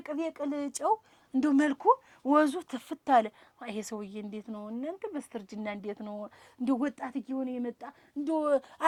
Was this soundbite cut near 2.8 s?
no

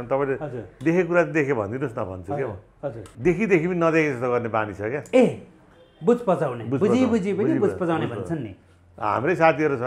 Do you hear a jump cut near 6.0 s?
no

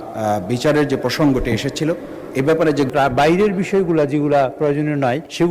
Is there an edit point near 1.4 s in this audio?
no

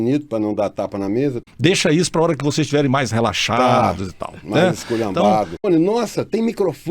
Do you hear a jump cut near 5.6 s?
yes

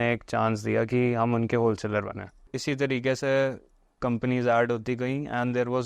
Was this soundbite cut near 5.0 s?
no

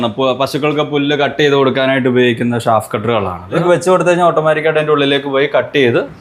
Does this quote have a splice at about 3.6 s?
yes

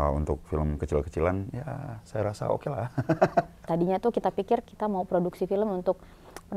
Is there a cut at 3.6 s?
yes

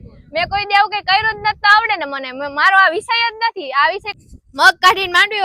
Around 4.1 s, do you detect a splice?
yes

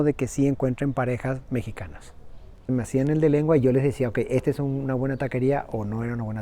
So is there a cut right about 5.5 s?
no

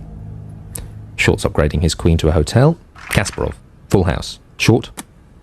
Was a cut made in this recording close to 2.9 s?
yes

